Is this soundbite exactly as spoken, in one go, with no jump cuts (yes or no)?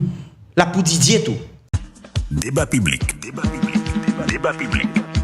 no